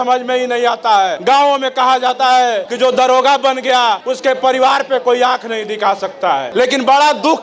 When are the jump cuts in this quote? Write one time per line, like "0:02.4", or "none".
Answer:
0:01.2
0:02.7
0:04.1
0:06.5

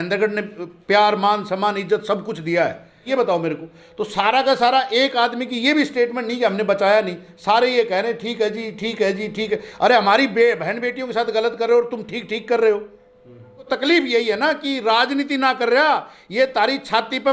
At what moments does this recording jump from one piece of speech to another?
0:03.1
0:13.7

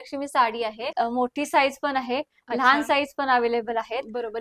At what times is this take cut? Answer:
0:00.9

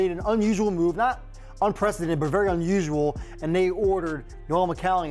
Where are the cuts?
0:03.3

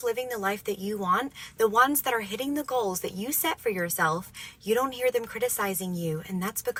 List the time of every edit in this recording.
none

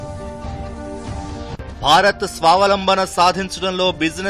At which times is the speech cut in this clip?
0:01.2

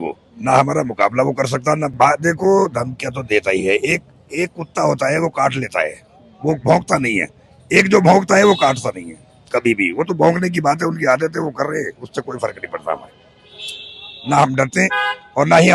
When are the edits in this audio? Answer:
0:01.9

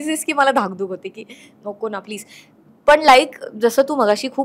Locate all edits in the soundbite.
none

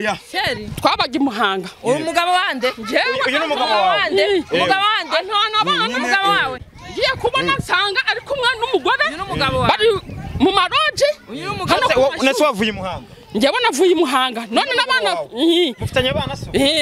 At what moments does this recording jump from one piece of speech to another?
none

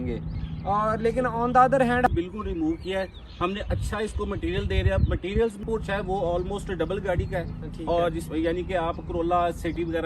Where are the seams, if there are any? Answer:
0:02.1
0:05.6

